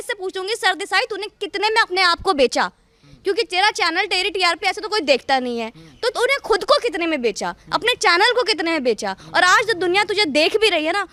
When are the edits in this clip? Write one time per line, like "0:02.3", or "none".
none